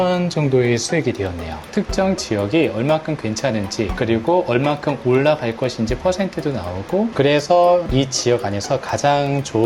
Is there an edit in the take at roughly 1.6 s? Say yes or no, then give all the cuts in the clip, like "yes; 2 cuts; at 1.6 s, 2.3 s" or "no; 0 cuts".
yes; 2 cuts; at 1.6 s, 7.1 s